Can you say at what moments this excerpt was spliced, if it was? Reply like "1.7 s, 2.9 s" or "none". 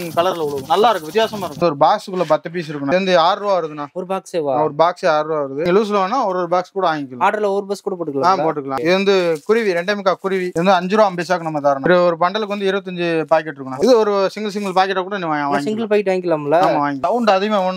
1.6 s, 2.9 s, 5.6 s, 8.8 s, 17.0 s